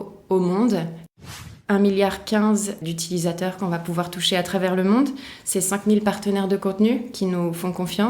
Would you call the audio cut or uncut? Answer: cut